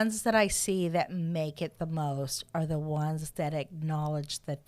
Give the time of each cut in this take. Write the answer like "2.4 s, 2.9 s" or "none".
none